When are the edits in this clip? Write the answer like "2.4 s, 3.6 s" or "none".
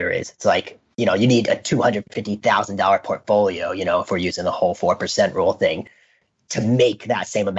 none